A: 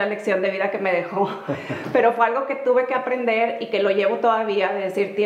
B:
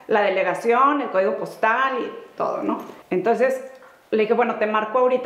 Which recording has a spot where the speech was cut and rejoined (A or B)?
B